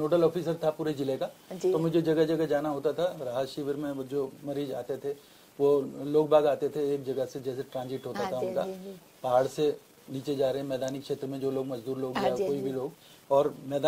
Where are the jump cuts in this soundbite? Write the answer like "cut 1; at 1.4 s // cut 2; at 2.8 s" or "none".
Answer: none